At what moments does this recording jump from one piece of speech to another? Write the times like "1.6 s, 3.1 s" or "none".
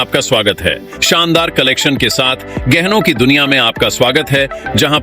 1.0 s